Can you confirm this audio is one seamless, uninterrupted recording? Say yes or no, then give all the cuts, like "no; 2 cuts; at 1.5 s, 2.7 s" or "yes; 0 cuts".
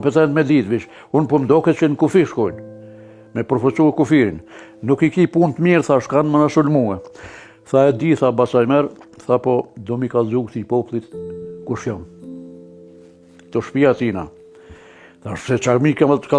yes; 0 cuts